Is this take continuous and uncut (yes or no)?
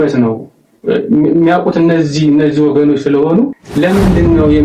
no